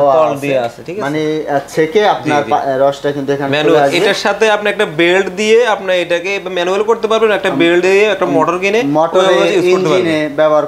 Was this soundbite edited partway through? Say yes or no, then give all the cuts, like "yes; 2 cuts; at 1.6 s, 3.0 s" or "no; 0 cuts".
no; 0 cuts